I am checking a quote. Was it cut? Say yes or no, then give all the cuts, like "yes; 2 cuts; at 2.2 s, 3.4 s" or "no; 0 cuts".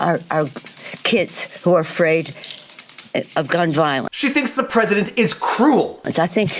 no; 0 cuts